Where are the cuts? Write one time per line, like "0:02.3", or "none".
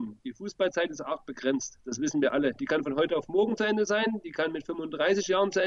none